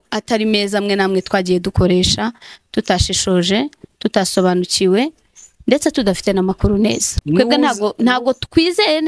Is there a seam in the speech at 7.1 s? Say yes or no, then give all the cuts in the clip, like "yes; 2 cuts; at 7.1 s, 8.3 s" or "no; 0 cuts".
yes; 1 cut; at 7.1 s